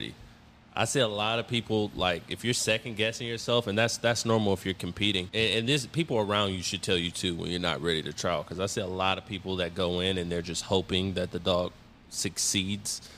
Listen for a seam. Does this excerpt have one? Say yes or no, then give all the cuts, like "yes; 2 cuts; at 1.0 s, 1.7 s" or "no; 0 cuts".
yes; 1 cut; at 5.3 s